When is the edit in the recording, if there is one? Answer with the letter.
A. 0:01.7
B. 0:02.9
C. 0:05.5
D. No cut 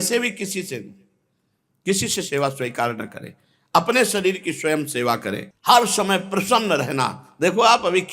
C